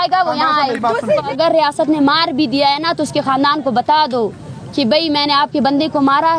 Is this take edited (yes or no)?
yes